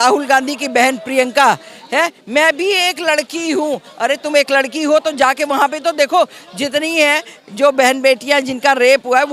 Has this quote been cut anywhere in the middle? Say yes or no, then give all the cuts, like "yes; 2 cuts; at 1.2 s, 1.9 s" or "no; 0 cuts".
no; 0 cuts